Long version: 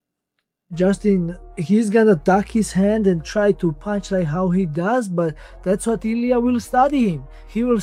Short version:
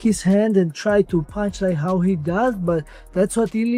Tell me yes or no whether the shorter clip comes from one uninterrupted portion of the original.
yes